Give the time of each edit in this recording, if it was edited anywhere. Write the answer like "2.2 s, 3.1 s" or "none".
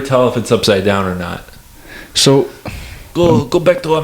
3.1 s